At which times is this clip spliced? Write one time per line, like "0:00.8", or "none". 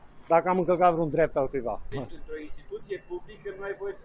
0:01.9